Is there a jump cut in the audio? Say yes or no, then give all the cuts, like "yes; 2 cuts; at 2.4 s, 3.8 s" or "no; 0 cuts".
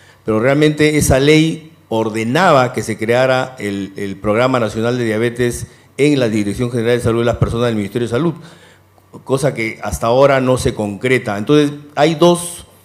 yes; 1 cut; at 2.0 s